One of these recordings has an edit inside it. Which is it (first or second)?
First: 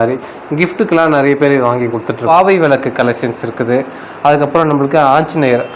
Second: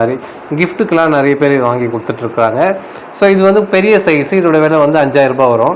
first